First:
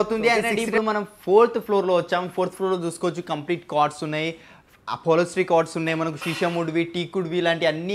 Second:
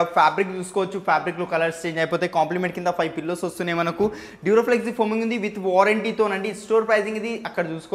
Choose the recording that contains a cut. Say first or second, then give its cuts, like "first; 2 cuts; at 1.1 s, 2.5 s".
first; 1 cut; at 1.1 s